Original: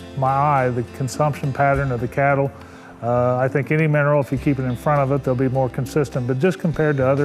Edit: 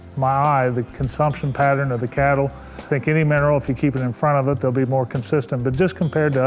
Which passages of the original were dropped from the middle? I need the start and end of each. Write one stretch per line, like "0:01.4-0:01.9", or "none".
0:02.9-0:03.5